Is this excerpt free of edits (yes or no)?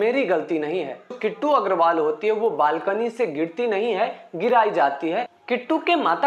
no